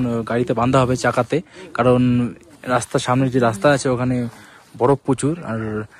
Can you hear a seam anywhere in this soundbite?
no; 0 cuts

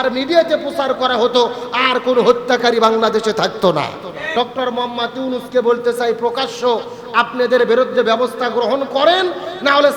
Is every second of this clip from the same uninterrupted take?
no; 1 cut; at 4.3 s

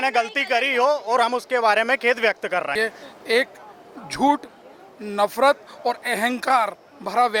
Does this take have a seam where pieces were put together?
yes; 1 cut; at 2.7 s

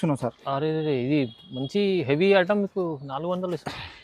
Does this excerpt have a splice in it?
no; 0 cuts

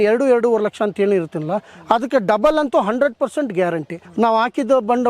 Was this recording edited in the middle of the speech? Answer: yes; 1 cut; at 4.0 s

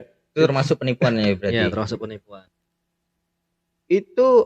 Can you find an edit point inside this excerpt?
yes; 1 cut; at 2.4 s

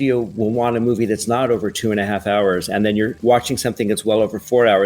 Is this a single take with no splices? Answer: no; 1 cut; at 3.2 s

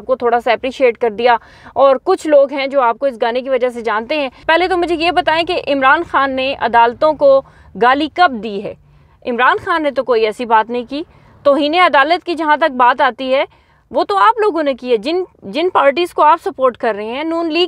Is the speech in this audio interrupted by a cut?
no; 0 cuts

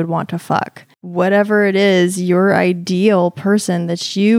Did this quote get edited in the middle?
yes; 1 cut; at 1.0 s

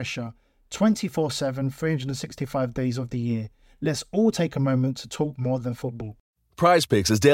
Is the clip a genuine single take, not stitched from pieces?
no; 1 cut; at 6.1 s

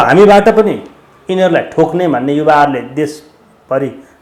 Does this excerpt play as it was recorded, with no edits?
yes; 0 cuts

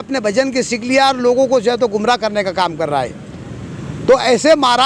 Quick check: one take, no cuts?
yes; 0 cuts

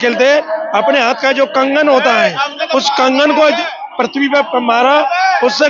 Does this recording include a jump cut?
no; 0 cuts

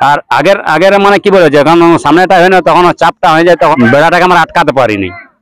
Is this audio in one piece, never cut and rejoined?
no; 1 cut; at 3.7 s

